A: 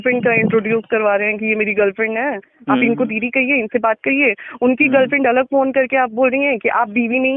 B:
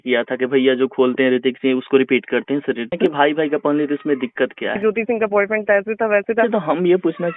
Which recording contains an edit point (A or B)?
B